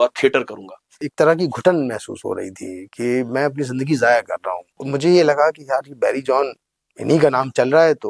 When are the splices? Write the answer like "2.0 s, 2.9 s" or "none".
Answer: 1.1 s, 4.8 s